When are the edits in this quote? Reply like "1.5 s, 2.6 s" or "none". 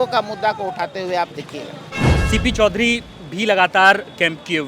2.0 s